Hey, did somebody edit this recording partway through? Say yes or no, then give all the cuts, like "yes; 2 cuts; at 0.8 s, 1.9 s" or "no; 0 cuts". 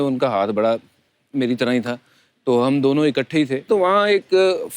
yes; 1 cut; at 3.6 s